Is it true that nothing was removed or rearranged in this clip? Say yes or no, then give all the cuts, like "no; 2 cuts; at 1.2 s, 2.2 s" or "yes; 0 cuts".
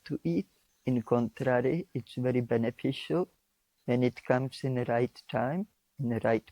yes; 0 cuts